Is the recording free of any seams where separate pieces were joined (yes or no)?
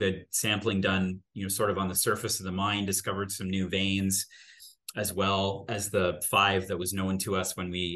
yes